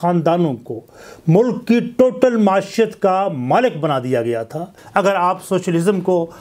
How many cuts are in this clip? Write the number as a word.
one